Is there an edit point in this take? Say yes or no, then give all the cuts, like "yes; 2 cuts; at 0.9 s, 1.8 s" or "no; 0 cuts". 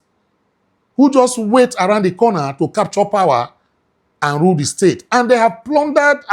no; 0 cuts